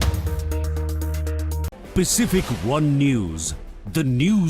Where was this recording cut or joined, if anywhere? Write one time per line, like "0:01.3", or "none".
0:01.6